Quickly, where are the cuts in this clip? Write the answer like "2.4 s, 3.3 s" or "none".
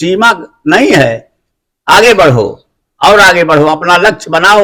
none